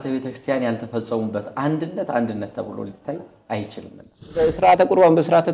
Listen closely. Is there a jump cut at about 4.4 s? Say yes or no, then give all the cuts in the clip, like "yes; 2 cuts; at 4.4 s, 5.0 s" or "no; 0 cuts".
yes; 1 cut; at 4.4 s